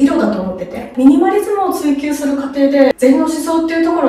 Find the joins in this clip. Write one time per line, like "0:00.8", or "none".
0:00.9
0:03.0